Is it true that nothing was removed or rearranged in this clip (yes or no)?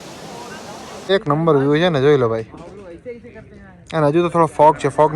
no